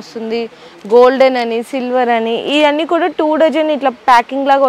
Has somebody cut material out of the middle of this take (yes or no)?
no